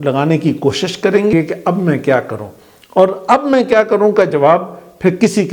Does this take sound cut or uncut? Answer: cut